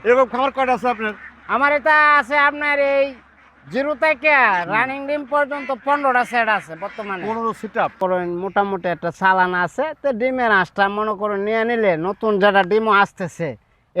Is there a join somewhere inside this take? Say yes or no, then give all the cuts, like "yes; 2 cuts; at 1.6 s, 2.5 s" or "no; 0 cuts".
yes; 1 cut; at 8.0 s